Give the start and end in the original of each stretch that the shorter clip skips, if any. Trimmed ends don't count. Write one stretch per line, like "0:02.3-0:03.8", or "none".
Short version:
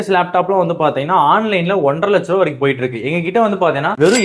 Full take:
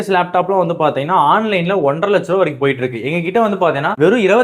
none